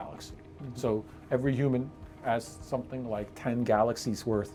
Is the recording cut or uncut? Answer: uncut